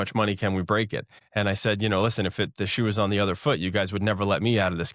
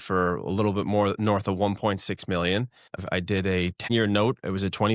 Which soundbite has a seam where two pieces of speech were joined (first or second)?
second